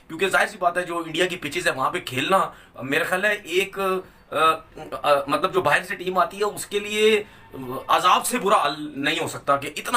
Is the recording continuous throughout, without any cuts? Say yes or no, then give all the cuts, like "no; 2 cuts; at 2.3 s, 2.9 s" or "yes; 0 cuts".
yes; 0 cuts